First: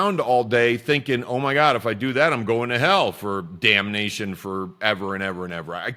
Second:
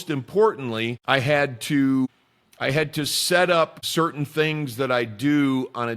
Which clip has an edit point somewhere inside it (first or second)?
second